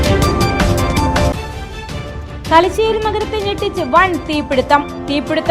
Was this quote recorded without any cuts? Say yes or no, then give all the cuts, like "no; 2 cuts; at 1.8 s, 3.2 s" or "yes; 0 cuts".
no; 1 cut; at 1.2 s